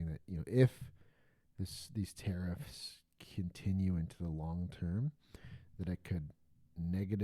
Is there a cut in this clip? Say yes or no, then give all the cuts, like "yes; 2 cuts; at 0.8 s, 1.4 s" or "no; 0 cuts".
no; 0 cuts